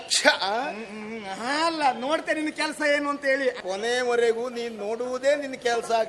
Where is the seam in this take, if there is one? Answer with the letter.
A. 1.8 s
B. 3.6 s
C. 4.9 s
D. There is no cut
B